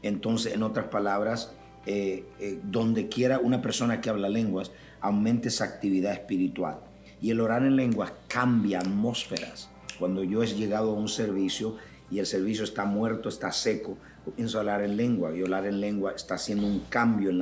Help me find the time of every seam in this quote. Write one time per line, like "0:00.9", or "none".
none